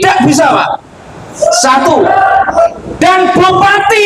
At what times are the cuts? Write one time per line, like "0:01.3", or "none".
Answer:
none